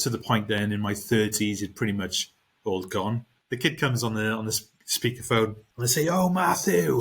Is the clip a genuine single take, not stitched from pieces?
no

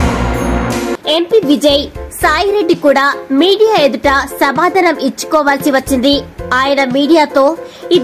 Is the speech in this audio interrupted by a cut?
yes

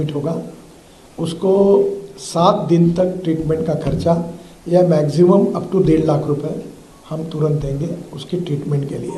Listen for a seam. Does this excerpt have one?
no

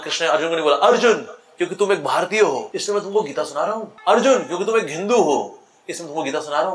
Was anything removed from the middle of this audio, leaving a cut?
yes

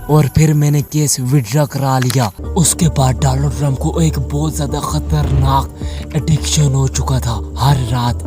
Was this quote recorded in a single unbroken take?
no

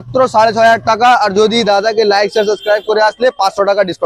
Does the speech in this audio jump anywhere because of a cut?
no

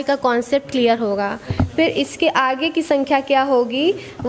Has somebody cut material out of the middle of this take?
no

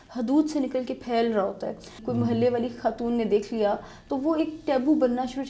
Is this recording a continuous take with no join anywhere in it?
no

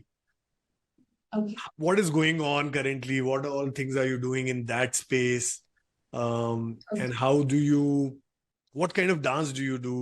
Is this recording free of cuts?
yes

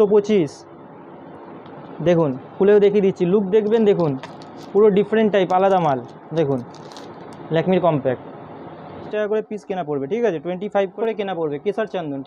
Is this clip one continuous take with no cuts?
no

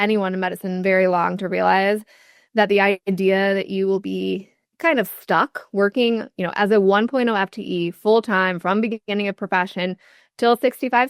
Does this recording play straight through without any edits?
yes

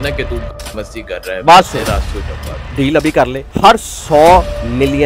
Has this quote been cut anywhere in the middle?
no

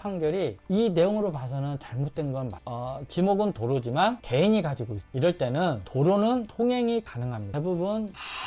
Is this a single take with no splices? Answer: no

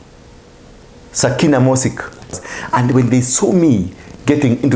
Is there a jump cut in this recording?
yes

